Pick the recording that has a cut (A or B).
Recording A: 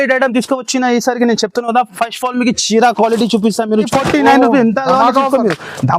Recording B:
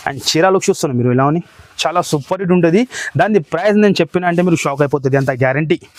A